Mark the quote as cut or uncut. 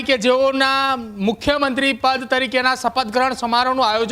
uncut